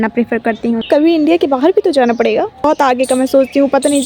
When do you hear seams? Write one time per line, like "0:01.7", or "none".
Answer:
0:00.8
0:02.6